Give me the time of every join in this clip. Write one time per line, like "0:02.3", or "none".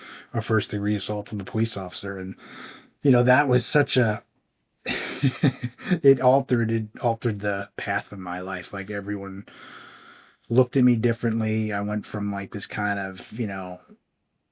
none